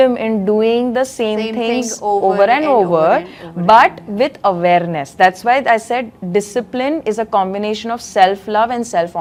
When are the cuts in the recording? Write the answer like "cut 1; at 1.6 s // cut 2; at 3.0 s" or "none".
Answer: none